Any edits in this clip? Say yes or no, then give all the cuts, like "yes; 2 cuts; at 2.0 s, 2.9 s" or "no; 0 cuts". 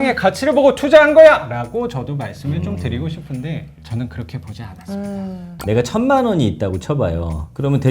yes; 2 cuts; at 3.8 s, 5.5 s